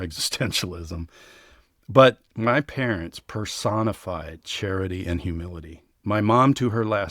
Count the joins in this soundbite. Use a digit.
1